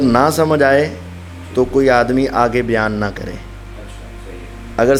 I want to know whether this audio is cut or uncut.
uncut